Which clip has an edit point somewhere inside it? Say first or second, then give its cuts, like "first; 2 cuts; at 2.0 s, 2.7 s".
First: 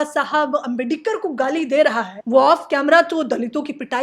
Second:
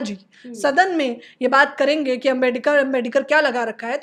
first; 1 cut; at 2.1 s